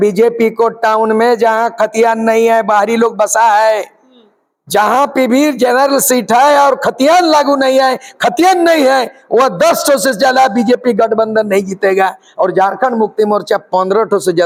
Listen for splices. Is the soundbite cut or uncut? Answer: uncut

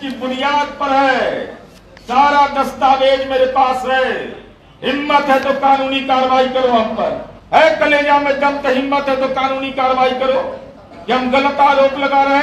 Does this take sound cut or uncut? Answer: uncut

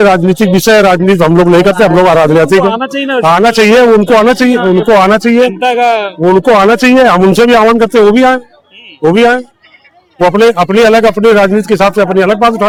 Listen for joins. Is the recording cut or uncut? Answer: uncut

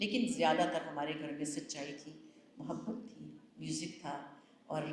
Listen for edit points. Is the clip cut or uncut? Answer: uncut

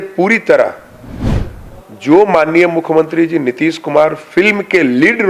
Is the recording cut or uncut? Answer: uncut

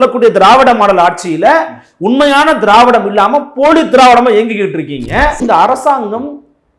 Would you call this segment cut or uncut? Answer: cut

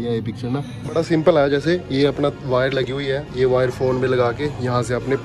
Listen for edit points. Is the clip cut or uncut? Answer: cut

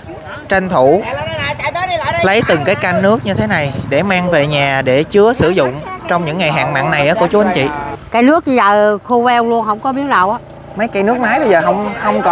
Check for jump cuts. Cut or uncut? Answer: cut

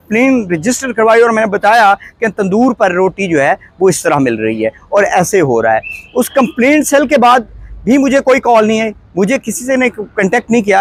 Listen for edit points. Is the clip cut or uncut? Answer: uncut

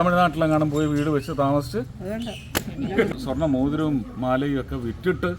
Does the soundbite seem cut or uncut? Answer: cut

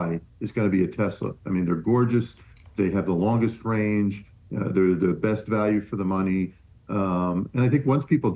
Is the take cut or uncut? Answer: uncut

